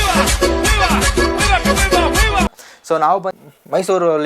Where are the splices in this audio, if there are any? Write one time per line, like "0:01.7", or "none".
0:03.3

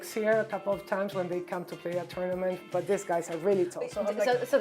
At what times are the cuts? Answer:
0:02.6

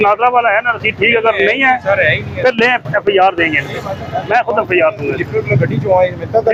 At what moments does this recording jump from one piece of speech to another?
none

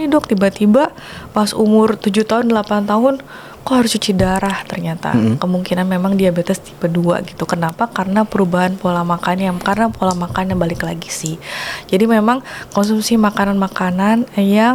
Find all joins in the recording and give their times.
none

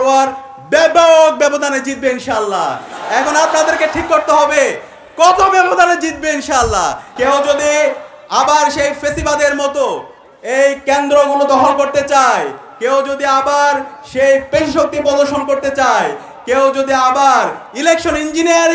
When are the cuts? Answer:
0:07.0

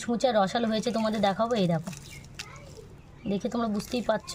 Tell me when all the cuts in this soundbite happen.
none

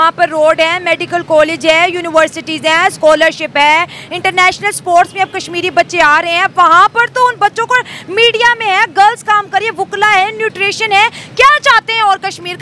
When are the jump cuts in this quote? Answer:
none

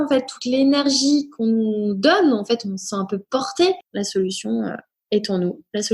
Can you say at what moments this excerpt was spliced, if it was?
0:03.9
0:04.9

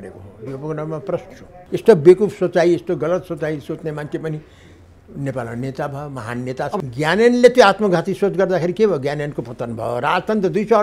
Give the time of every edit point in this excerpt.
0:01.5
0:06.8

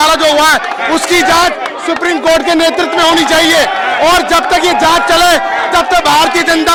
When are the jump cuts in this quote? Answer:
none

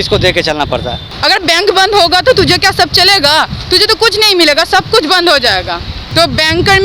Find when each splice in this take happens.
0:01.1
0:06.1

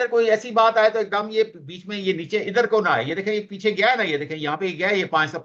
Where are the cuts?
none

